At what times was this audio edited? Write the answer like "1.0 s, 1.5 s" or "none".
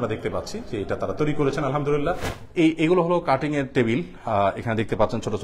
2.3 s